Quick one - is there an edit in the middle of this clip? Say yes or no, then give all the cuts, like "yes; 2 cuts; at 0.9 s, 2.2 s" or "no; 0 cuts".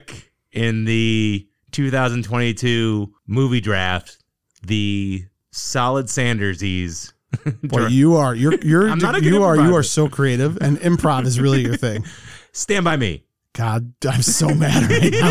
no; 0 cuts